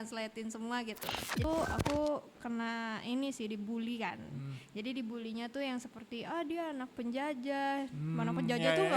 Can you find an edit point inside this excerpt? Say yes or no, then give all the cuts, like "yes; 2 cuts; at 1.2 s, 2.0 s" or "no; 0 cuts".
yes; 1 cut; at 1.4 s